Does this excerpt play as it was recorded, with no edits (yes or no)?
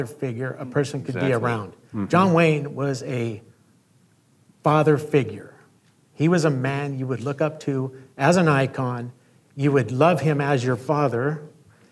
yes